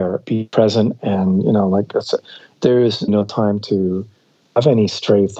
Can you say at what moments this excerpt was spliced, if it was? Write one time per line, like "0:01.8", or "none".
0:03.1
0:04.4